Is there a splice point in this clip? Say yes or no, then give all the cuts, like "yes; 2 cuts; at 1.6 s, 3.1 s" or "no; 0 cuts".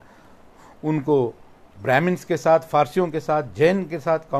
no; 0 cuts